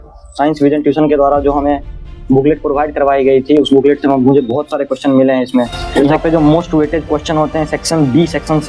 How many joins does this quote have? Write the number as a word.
one